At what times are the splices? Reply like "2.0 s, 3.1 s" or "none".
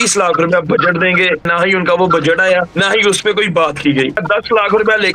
1.5 s, 2.7 s, 4.2 s

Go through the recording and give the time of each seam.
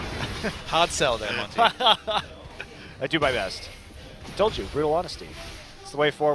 3.6 s

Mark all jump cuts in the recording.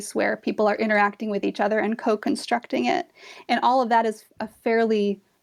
none

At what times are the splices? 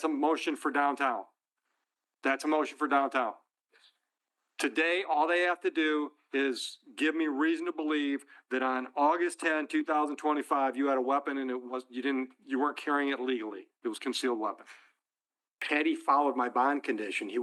15.6 s

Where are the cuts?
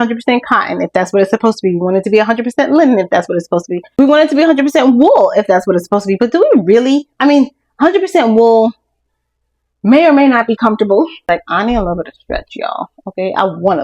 4.0 s, 11.2 s

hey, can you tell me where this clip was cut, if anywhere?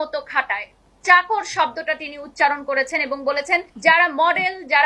3.7 s

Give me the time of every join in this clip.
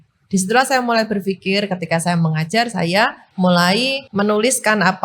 3.2 s, 4.0 s

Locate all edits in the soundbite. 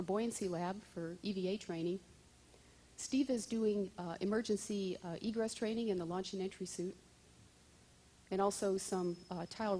6.4 s

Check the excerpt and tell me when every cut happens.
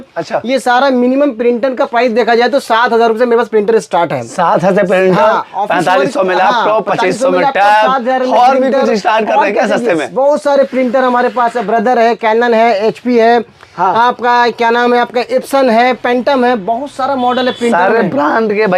none

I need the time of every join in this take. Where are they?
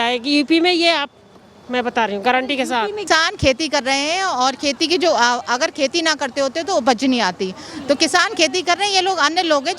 3.0 s

